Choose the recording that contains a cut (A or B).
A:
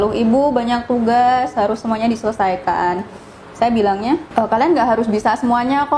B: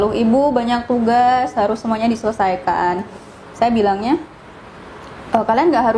A